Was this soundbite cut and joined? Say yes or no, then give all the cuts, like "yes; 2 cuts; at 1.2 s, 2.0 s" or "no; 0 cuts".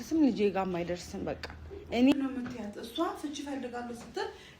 yes; 1 cut; at 2.1 s